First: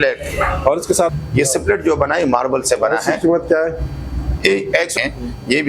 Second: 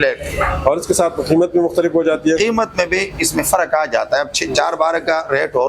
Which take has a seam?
first; 2 cuts; at 1.2 s, 4.9 s

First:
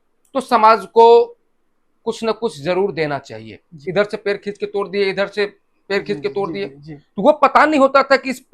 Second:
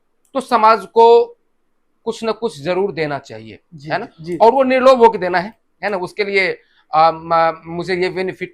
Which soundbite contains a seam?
first; 1 cut; at 3.7 s

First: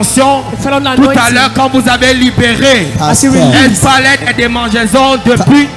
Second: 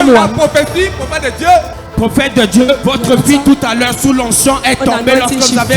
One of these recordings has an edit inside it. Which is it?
second; 2 cuts; at 1.8 s, 2.8 s

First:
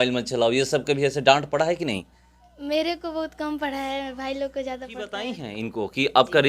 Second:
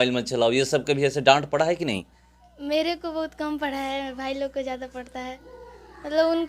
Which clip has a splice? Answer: first; 1 cut; at 5.4 s

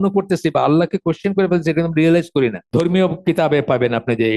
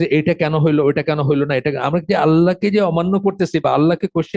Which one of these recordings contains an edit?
first; 1 cut; at 2.6 s

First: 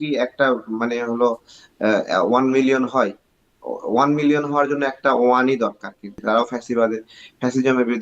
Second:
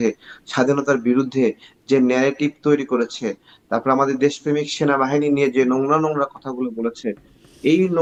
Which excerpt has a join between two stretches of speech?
first; 1 cut; at 6.1 s

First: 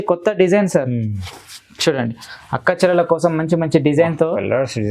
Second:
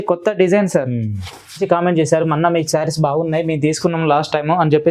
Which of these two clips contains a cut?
second; 1 cut; at 1.6 s

